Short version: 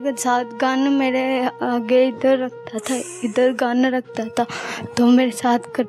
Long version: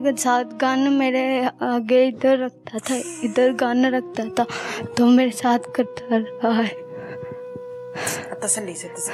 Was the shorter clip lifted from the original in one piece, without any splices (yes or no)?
yes